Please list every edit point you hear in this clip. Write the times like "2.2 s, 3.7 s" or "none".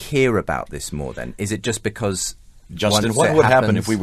1.3 s